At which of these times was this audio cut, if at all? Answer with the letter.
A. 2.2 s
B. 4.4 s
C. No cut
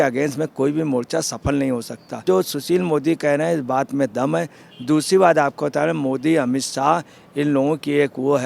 A